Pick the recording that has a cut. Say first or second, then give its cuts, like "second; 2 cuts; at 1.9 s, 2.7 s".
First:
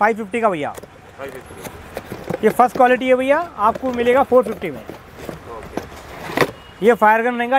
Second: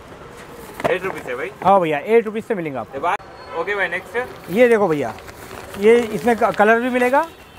second; 1 cut; at 3.2 s